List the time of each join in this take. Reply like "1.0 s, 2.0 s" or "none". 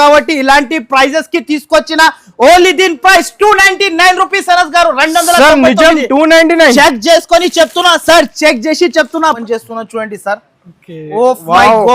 9.4 s